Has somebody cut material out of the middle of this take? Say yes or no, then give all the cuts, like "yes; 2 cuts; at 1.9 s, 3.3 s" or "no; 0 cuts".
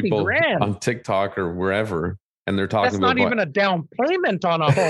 no; 0 cuts